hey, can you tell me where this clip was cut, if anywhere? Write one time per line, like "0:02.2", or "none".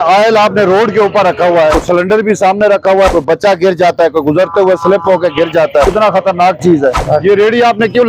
0:01.8
0:03.1
0:05.8
0:07.0